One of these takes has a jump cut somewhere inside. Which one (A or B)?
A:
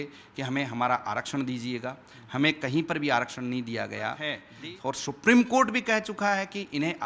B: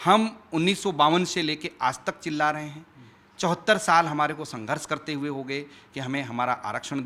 A